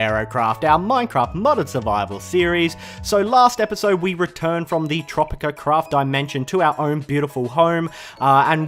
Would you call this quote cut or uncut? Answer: uncut